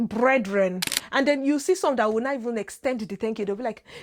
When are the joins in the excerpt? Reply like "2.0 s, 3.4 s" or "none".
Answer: 1.0 s